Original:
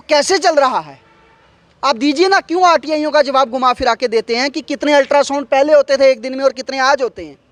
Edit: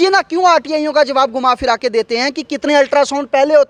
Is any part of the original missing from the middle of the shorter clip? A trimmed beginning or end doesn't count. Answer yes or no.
no